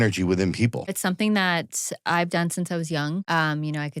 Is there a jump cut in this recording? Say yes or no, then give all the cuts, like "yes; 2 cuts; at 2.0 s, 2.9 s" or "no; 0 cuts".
yes; 2 cuts; at 0.9 s, 3.2 s